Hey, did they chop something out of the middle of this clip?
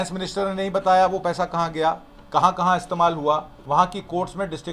yes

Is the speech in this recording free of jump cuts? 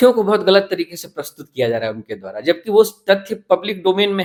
yes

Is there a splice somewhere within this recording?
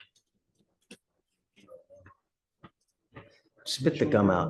no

